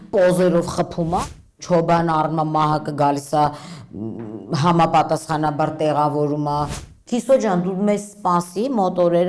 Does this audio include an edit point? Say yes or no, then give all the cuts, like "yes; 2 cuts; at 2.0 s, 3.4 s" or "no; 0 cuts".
yes; 2 cuts; at 1.2 s, 6.8 s